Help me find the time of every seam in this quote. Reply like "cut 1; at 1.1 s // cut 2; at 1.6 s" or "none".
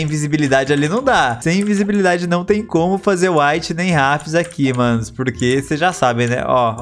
none